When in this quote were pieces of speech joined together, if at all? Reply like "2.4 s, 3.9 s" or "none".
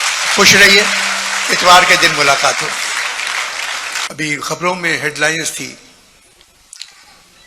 4.1 s